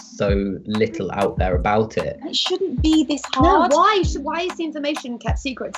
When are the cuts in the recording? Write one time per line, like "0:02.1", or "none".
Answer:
0:02.4

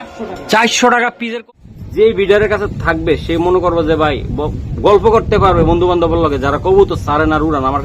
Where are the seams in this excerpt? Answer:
0:01.2

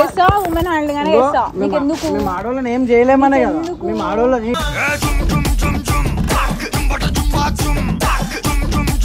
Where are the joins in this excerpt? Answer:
none

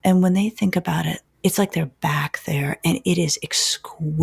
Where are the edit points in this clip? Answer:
0:01.2

